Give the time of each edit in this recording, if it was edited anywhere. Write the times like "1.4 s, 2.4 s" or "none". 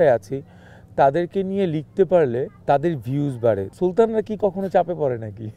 2.6 s, 3.7 s